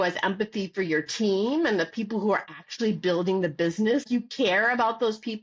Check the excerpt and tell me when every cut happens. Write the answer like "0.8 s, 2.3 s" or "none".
4.0 s